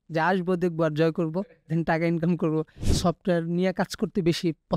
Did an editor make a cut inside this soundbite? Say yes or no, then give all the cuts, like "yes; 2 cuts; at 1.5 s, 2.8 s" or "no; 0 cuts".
yes; 1 cut; at 2.8 s